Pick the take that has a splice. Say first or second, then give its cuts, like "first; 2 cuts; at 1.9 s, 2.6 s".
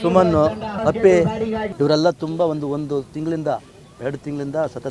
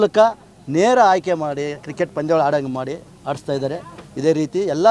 first; 2 cuts; at 0.8 s, 1.6 s